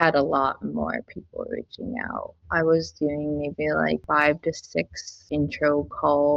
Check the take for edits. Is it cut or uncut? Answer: cut